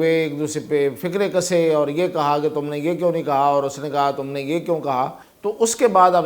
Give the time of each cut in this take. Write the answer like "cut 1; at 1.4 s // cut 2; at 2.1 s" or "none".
cut 1; at 5.3 s

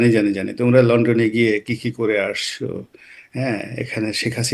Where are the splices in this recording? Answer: none

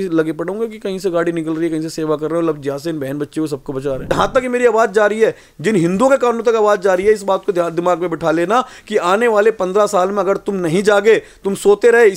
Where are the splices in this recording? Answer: cut 1; at 4.1 s

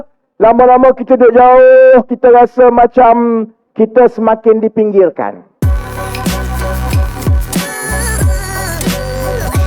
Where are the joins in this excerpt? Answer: cut 1; at 5.5 s

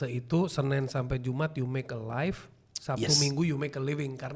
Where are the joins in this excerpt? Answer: none

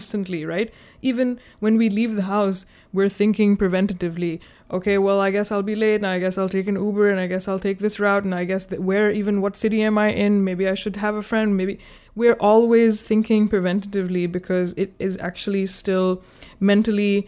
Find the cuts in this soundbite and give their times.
none

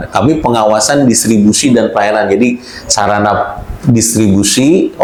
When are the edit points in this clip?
none

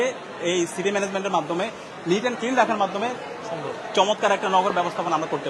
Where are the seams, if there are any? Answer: none

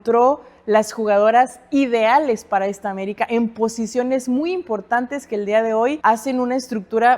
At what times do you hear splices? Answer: cut 1; at 6.0 s

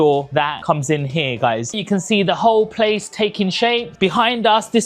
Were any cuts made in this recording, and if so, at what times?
cut 1; at 1.7 s // cut 2; at 3.9 s

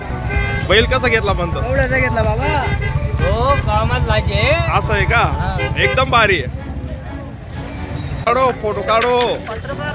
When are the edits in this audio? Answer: cut 1; at 8.2 s

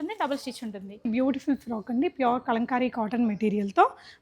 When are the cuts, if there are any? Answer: cut 1; at 1.1 s

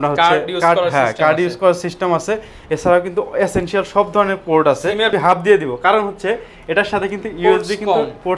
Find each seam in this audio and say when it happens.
cut 1; at 5.1 s

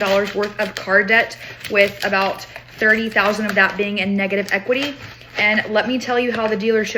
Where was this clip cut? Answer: none

